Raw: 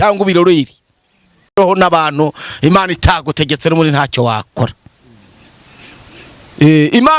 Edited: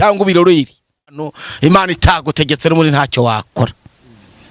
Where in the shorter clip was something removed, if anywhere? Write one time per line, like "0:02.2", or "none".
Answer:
0:01.4